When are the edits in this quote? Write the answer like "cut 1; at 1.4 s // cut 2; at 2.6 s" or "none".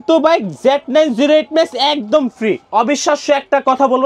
cut 1; at 2.7 s